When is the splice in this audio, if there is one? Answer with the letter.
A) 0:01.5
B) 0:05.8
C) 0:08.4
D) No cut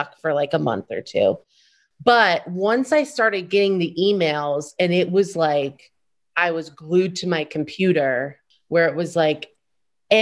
C